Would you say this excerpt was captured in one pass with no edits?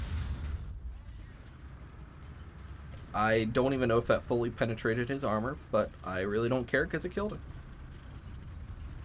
yes; 0 cuts

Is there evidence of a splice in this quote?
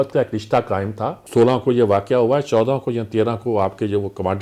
yes; 1 cut; at 1.2 s

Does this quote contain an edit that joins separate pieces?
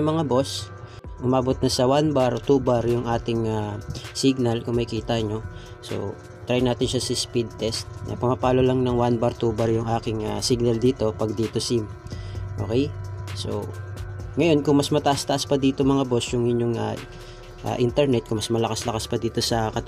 yes; 1 cut; at 1.1 s

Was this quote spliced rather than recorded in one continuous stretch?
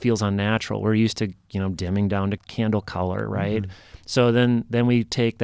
yes; 1 cut; at 2.4 s

